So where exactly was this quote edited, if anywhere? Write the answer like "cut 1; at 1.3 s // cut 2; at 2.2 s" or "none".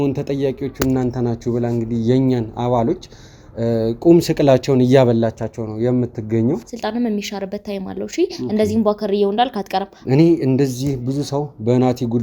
cut 1; at 6.7 s // cut 2; at 10.0 s